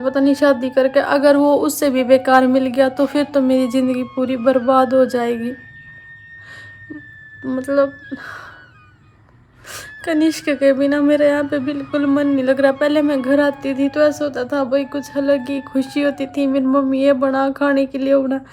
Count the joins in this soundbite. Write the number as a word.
zero